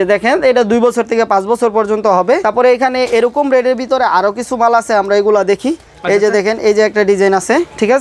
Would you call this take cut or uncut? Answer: cut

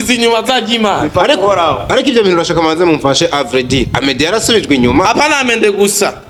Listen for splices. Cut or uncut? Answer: uncut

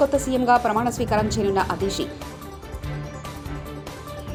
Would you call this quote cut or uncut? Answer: uncut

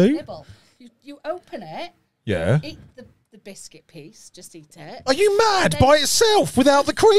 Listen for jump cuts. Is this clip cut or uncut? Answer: uncut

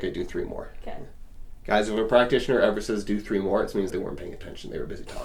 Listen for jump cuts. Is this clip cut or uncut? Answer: cut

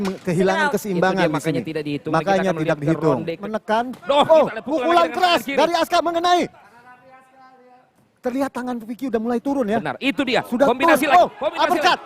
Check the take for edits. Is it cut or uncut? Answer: cut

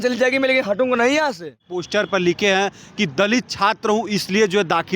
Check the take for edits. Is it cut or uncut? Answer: cut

